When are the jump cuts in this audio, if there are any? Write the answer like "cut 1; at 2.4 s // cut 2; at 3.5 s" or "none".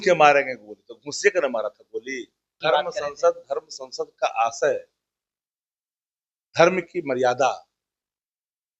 cut 1; at 2.5 s